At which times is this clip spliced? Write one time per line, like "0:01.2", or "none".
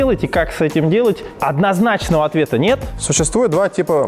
0:01.3
0:03.0